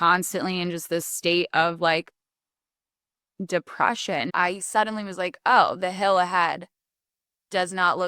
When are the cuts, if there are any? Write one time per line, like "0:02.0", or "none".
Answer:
0:04.3